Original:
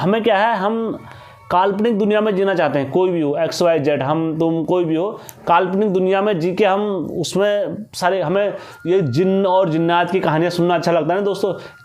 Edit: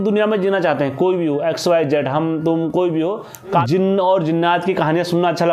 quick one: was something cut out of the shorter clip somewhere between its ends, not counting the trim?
yes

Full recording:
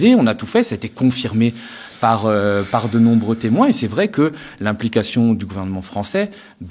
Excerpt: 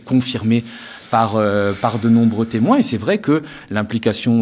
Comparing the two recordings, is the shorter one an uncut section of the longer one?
yes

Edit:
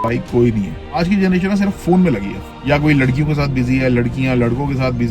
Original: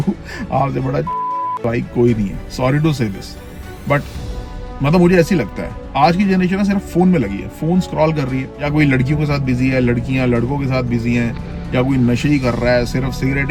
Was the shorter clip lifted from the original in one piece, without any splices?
no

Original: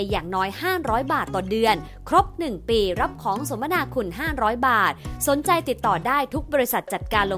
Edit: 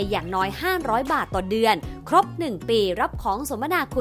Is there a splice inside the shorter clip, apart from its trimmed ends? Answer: no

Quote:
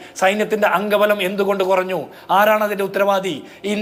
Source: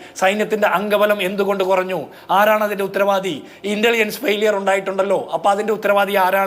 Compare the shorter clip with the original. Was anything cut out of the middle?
no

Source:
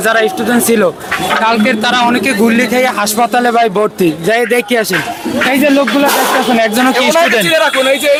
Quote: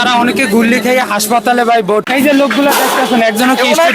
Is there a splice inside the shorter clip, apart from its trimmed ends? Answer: yes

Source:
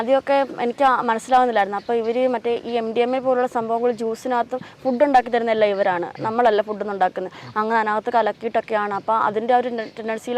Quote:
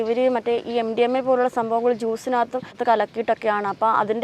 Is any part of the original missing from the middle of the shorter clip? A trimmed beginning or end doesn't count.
yes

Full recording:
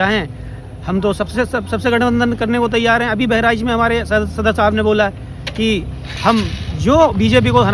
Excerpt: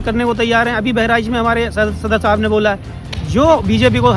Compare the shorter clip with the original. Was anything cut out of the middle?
yes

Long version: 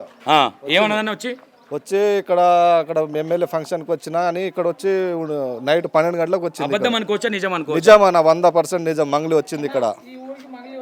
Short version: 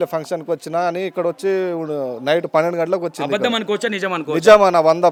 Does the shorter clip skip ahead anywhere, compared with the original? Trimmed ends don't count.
no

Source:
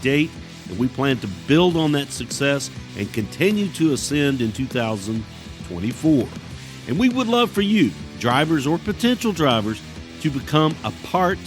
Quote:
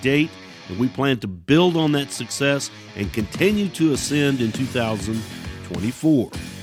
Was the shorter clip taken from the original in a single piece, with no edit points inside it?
yes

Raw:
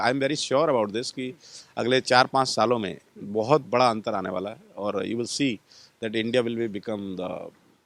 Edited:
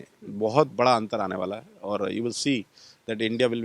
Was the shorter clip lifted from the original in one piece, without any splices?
yes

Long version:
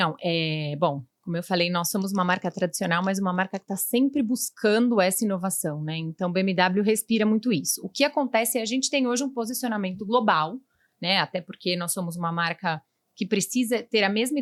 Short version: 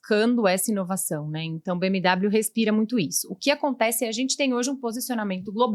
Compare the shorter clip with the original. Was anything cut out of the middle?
no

